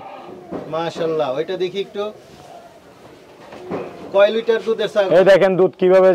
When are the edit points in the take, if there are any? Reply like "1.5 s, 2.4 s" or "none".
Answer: none